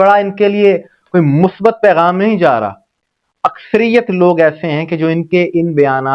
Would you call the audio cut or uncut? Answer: uncut